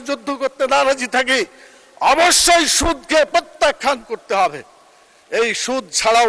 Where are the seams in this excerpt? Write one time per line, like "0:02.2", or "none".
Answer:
none